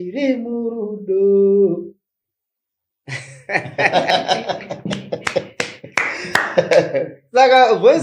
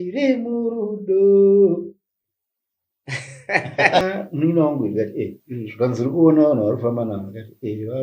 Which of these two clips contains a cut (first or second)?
second